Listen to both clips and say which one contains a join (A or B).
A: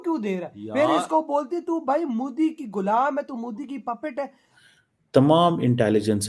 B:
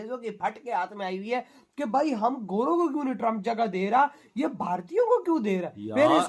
A